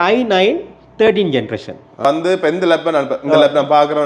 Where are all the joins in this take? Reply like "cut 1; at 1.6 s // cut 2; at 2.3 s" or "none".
cut 1; at 2.0 s